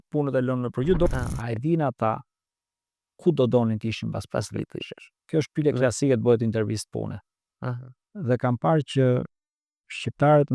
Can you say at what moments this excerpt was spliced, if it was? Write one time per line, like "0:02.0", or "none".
0:01.1